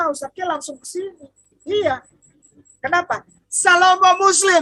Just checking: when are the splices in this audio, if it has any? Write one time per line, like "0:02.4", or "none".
none